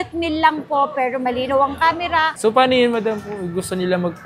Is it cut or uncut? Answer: cut